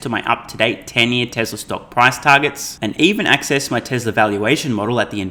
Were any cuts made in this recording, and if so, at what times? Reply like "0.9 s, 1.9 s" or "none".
none